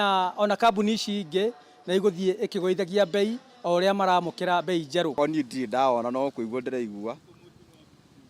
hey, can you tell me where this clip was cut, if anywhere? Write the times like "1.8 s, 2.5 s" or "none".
5.1 s

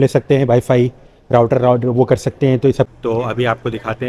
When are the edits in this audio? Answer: 2.9 s

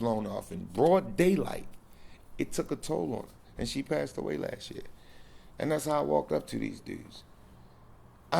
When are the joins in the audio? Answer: none

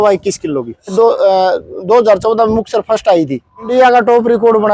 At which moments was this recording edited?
0.9 s, 3.7 s

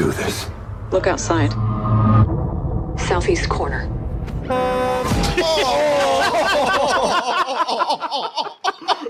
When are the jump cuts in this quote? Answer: none

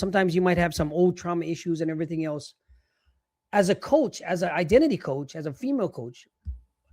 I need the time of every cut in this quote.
none

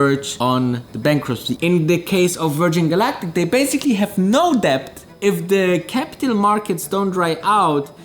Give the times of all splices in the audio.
1.5 s, 5.0 s

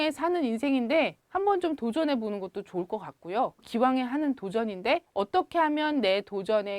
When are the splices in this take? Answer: 1.2 s, 3.6 s, 5.1 s

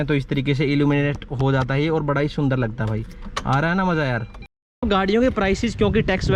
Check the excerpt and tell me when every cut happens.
4.8 s

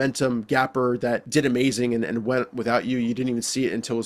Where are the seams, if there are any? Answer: 1.2 s

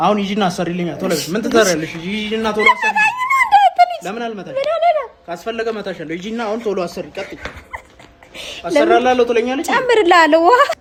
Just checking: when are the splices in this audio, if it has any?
none

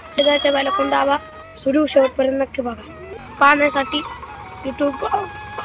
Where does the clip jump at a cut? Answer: 1.5 s, 3.3 s

